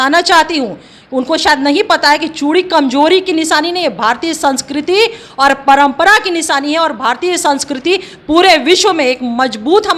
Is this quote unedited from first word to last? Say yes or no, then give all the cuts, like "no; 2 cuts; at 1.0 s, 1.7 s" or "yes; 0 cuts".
yes; 0 cuts